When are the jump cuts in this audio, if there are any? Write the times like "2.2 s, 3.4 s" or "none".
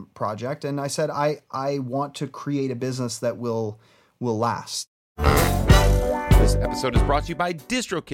5.0 s